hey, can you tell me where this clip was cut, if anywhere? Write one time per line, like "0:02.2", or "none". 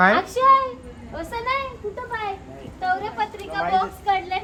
none